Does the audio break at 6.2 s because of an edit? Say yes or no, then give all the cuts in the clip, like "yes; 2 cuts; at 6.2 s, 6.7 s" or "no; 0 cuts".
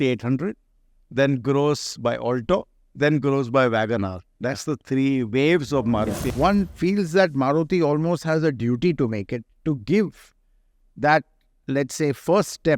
yes; 1 cut; at 6.2 s